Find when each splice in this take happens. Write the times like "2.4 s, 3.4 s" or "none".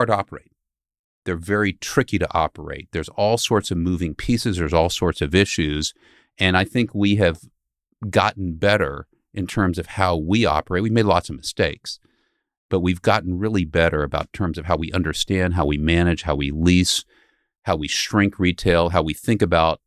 none